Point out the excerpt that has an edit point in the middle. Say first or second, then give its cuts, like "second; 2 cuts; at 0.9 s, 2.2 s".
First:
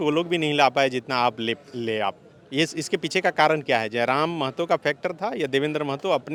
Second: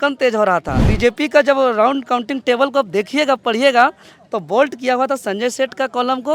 second; 1 cut; at 0.9 s